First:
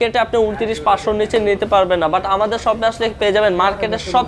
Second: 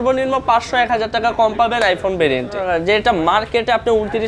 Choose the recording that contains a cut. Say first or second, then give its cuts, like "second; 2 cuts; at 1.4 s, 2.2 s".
second; 1 cut; at 2.6 s